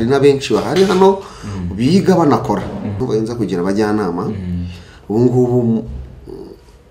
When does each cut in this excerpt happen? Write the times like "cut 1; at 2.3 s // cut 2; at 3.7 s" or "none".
cut 1; at 3.0 s